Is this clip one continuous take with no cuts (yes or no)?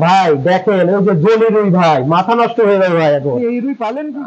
yes